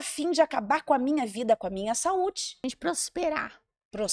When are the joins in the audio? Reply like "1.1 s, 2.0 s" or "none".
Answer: 2.5 s